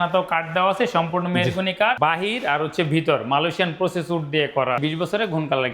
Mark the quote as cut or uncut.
cut